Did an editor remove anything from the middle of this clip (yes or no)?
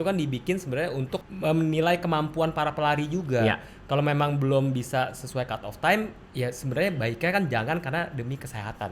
yes